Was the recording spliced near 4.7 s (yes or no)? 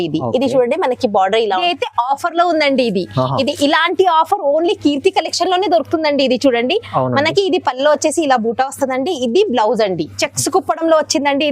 no